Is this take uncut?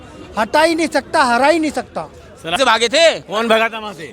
no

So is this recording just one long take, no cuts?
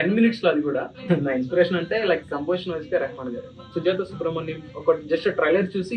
no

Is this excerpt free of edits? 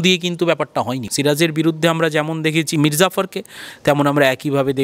no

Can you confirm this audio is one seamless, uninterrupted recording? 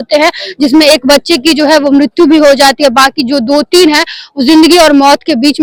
yes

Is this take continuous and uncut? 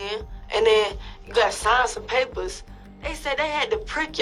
yes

